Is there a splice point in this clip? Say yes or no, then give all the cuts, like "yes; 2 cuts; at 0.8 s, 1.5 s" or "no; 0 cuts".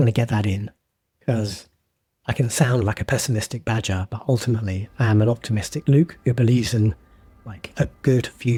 no; 0 cuts